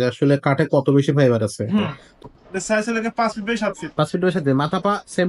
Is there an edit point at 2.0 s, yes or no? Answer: yes